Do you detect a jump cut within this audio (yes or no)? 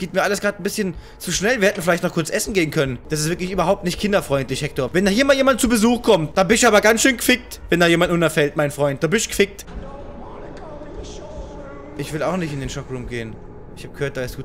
yes